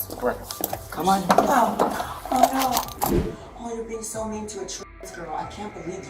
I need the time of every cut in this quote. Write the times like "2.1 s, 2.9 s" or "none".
3.0 s

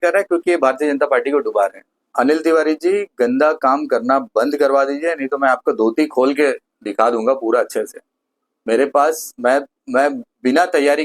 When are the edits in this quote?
2.0 s

